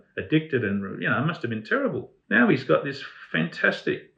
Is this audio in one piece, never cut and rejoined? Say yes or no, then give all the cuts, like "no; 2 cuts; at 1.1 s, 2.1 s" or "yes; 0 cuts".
no; 1 cut; at 2.1 s